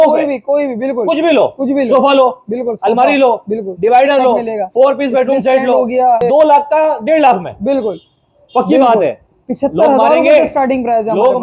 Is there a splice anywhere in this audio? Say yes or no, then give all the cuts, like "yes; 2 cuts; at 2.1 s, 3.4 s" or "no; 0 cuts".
yes; 1 cut; at 6.2 s